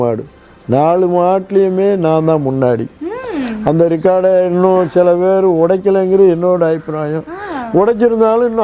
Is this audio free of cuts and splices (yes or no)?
yes